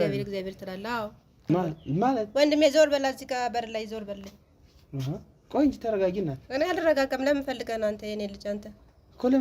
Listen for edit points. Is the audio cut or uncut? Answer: cut